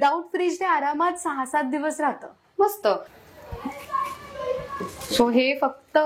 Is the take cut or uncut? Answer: cut